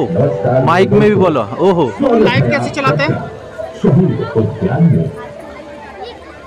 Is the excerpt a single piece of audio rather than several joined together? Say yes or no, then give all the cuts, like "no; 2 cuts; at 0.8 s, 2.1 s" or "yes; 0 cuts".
yes; 0 cuts